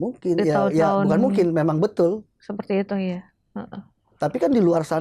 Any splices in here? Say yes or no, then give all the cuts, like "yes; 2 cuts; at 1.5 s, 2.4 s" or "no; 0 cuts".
no; 0 cuts